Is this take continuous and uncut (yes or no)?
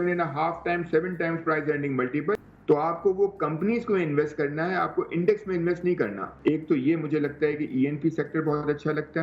no